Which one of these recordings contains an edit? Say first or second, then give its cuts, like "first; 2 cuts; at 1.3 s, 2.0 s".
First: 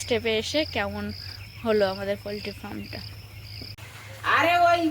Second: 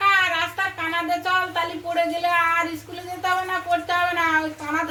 first; 1 cut; at 3.8 s